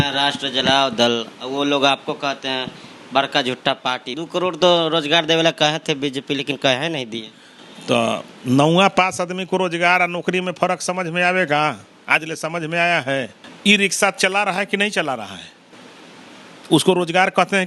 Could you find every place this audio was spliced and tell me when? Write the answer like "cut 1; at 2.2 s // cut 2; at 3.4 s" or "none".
cut 1; at 4.1 s // cut 2; at 13.4 s